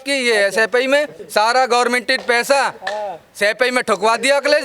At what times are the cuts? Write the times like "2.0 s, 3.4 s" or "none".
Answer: 1.2 s